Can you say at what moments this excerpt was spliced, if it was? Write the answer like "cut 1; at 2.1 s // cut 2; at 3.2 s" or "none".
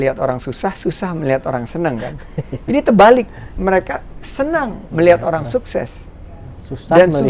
none